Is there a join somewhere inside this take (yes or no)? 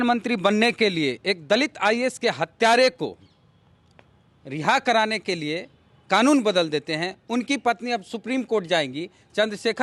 no